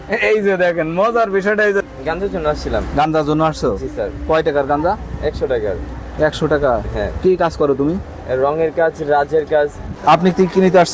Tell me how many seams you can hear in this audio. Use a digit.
2